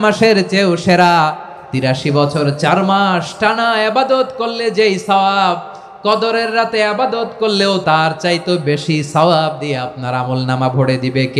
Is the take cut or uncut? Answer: cut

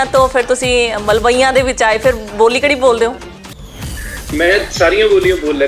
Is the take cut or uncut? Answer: uncut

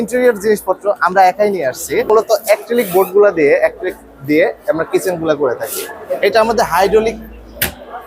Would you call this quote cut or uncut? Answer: cut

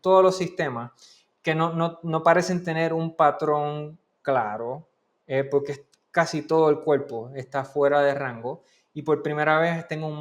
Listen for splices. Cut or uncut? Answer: uncut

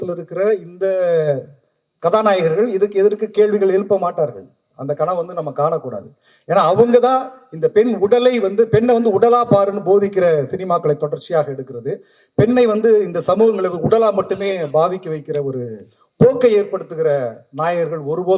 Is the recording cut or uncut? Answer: uncut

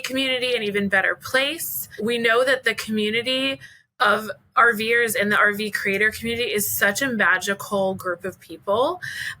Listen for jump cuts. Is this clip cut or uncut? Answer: cut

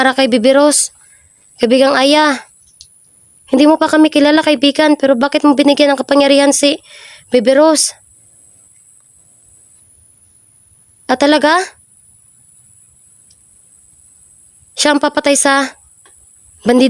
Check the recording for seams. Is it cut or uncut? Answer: uncut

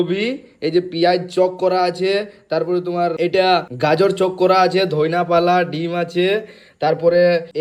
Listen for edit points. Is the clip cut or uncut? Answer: uncut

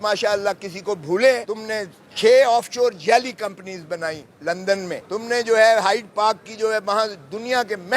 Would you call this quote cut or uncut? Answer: cut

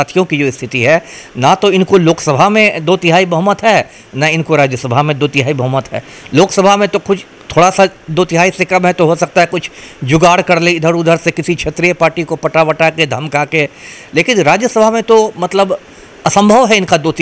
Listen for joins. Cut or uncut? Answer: uncut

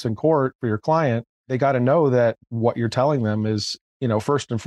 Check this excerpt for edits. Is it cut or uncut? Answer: uncut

